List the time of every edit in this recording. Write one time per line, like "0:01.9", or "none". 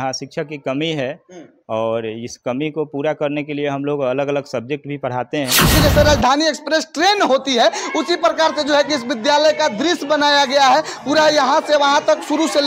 0:05.7